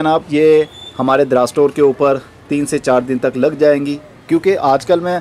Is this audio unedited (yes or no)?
no